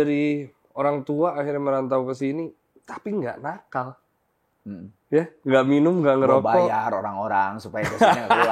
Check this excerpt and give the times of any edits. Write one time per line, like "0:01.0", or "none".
none